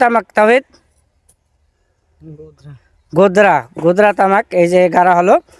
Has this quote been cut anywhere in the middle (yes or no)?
no